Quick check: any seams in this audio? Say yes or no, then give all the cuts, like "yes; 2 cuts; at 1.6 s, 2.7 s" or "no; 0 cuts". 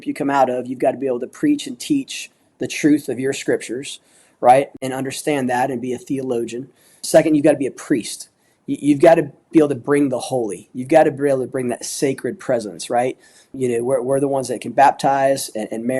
yes; 3 cuts; at 4.8 s, 7.0 s, 13.5 s